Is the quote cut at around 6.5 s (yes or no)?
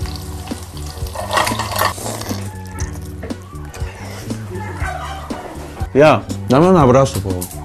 no